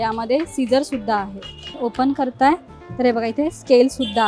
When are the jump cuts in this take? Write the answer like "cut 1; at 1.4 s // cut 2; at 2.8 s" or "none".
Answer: cut 1; at 1.8 s

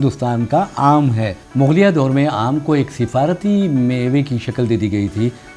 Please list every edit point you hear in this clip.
cut 1; at 1.4 s

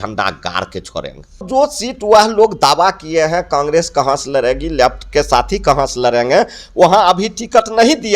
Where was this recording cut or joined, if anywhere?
cut 1; at 1.5 s

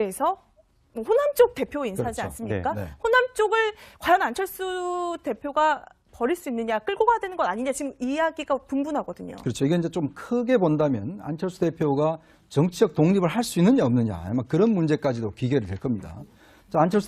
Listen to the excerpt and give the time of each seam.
none

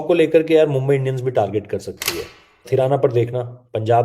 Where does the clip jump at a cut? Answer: cut 1; at 2.7 s

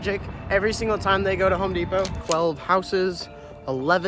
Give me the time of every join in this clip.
cut 1; at 2.2 s

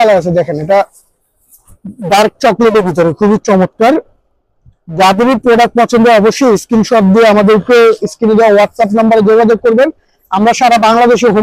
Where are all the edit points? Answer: none

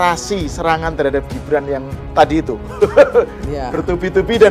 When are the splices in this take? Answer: none

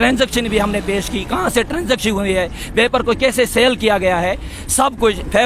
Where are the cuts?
none

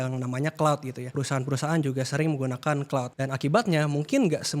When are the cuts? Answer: cut 1; at 1.1 s // cut 2; at 3.1 s

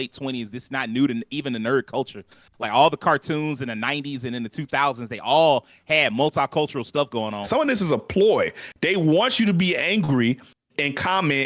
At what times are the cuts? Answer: cut 1; at 7.5 s

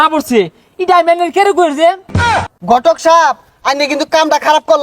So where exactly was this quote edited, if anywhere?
cut 1; at 2.2 s

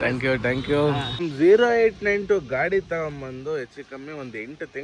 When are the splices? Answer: cut 1; at 1.2 s

